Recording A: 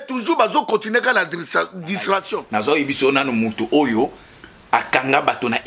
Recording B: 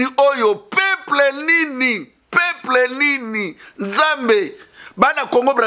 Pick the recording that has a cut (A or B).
A